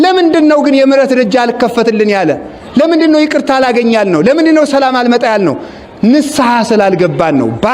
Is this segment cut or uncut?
uncut